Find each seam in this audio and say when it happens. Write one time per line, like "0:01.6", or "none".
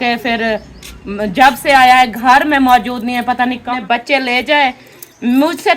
0:03.4